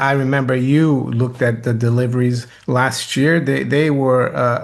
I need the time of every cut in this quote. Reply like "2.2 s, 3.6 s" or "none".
2.5 s